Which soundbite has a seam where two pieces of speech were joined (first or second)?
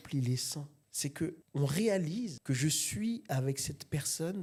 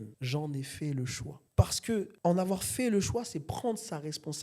second